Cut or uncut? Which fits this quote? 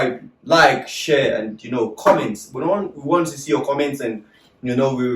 uncut